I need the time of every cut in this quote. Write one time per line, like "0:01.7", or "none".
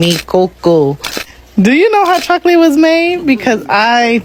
none